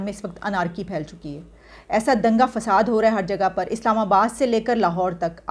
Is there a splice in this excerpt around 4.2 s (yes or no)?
no